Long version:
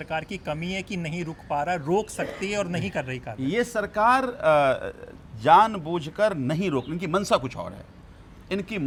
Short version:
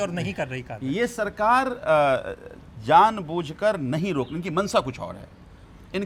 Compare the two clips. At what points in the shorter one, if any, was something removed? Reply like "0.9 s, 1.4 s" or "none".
none

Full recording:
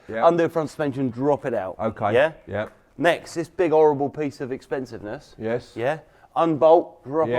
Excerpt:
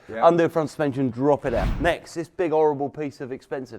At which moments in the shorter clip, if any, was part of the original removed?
1.7 s

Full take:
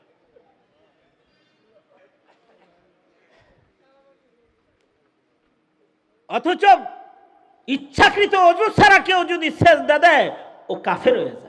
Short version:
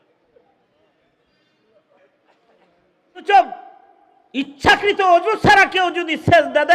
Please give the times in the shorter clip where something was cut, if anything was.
3.2 s

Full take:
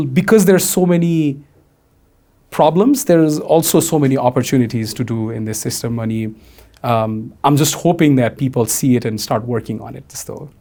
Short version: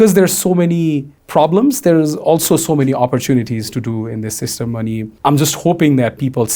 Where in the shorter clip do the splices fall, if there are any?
1.1 s, 5.1 s

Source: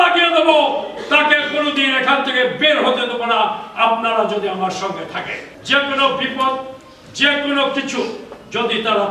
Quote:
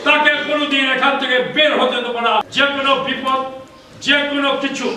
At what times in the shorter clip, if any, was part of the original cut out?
2.5 s

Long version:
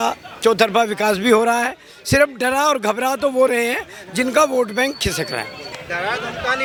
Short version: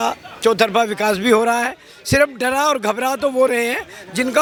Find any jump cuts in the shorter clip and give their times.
none

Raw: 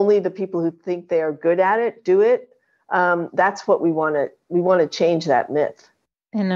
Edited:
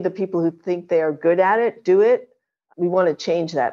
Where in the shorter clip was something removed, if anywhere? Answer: 2.6 s

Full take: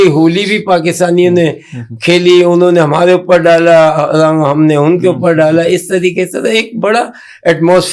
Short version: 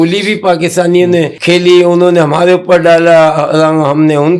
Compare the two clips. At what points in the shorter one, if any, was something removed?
1.4 s

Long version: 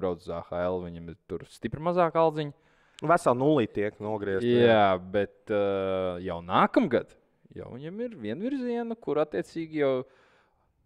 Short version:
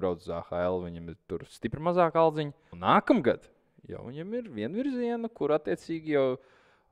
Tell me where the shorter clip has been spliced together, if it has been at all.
2.7 s

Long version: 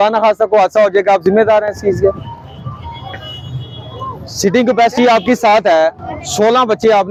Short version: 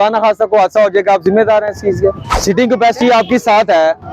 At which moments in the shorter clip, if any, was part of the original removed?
2.3 s

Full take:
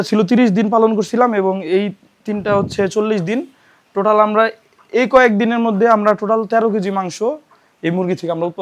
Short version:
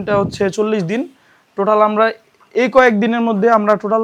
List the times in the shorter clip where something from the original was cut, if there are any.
none

